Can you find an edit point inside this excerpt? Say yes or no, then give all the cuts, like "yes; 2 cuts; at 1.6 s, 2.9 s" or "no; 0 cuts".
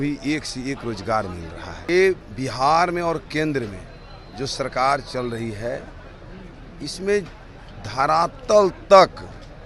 yes; 1 cut; at 1.9 s